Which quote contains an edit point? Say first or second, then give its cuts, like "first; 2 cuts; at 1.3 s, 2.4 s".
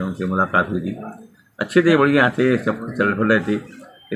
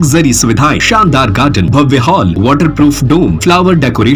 second; 4 cuts; at 0.8 s, 1.7 s, 2.3 s, 3.4 s